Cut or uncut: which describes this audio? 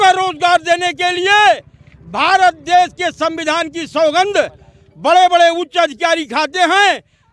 uncut